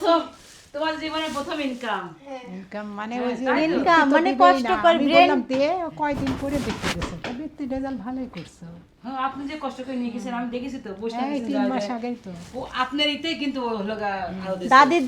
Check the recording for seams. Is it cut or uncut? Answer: uncut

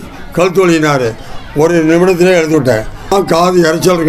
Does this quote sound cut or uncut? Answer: cut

